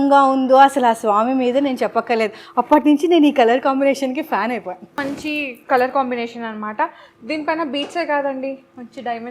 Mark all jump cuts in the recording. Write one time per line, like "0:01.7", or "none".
0:05.0